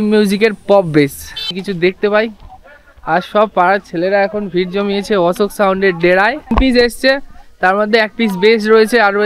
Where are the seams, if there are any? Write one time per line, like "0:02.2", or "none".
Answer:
0:01.5
0:06.5